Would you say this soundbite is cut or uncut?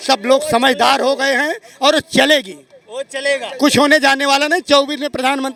uncut